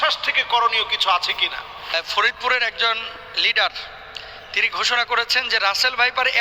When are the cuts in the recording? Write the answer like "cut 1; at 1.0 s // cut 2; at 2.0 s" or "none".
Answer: cut 1; at 1.9 s